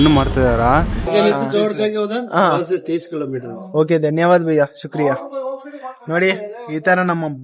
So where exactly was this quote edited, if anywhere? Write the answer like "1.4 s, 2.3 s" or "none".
1.1 s